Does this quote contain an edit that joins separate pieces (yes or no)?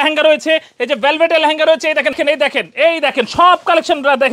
yes